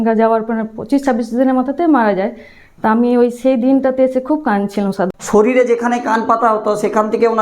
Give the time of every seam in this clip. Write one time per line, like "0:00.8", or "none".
0:05.1